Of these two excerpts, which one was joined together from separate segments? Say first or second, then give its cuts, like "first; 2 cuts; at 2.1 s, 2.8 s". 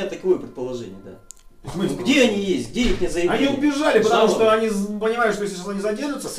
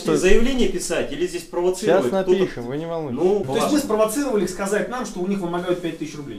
second; 1 cut; at 3.5 s